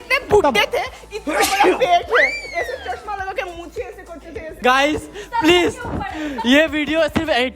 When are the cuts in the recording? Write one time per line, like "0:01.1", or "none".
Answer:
0:04.6